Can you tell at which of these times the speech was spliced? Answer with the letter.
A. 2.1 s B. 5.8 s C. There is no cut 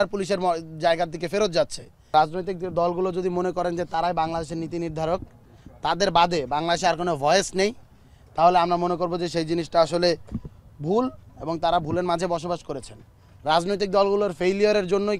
A